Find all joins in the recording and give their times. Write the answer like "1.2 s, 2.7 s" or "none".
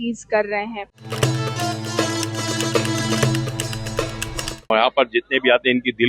1.0 s, 4.6 s